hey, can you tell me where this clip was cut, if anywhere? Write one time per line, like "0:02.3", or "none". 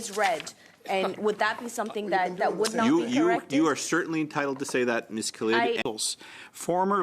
0:05.8

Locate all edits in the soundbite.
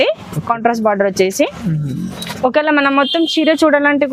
none

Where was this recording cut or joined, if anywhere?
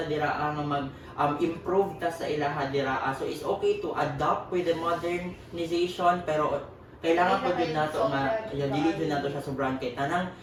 none

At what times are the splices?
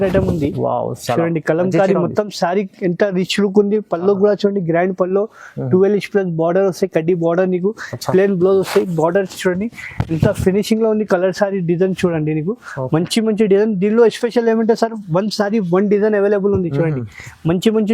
none

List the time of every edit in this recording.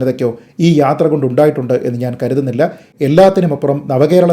0:02.9

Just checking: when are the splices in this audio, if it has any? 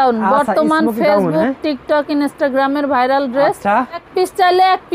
0:04.0

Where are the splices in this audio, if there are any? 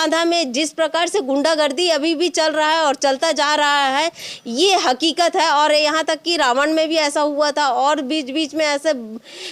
none

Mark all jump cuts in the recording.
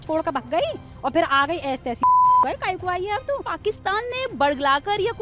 0:03.5

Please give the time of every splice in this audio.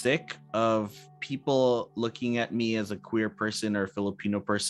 none

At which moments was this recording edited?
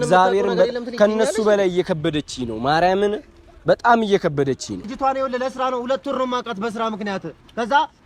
0:04.9

